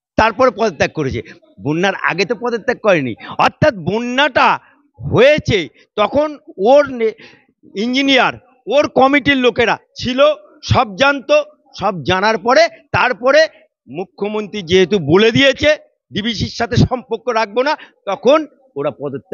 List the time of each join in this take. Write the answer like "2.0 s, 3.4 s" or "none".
none